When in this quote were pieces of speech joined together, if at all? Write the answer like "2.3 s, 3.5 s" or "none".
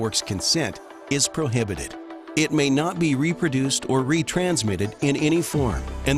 none

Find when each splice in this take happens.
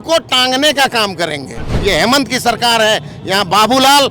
1.7 s

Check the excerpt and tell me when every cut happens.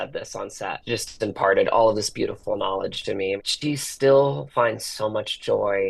0.8 s, 3.5 s

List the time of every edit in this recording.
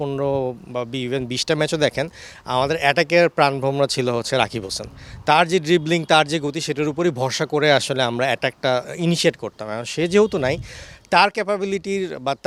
none

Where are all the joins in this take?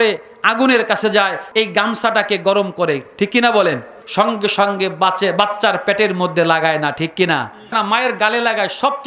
1.4 s, 4.0 s, 7.7 s

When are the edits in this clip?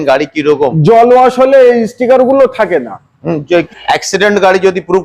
3.7 s

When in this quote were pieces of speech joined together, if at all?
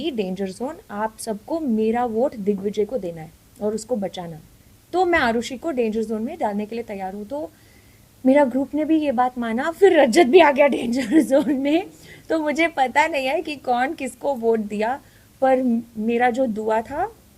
none

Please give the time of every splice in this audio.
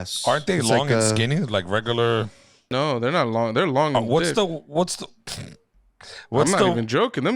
2.7 s

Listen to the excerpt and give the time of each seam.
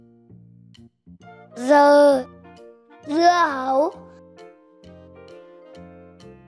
none

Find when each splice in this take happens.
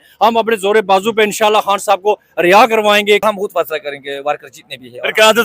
3.2 s

